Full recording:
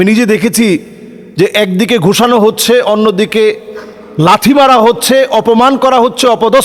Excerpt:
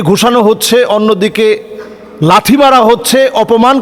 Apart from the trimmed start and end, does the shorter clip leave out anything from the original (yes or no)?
no